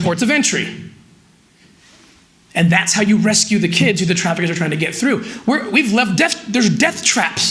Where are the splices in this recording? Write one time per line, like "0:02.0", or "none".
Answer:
none